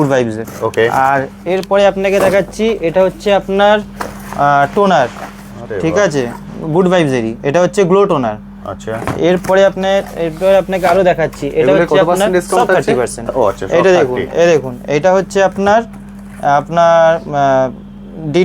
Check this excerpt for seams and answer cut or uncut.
uncut